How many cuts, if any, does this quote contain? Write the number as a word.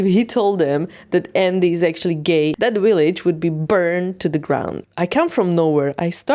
two